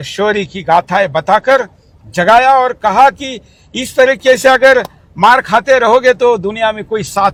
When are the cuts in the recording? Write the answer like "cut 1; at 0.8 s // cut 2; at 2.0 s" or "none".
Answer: none